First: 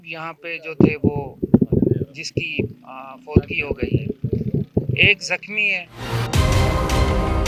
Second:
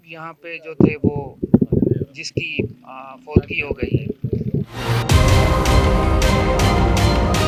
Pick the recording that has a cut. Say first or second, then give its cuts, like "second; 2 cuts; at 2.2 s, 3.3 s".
second; 1 cut; at 4.7 s